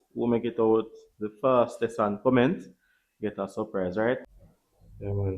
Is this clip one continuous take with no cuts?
no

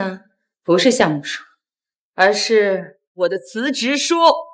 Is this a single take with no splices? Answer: no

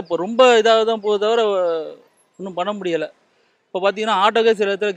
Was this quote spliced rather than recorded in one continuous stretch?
no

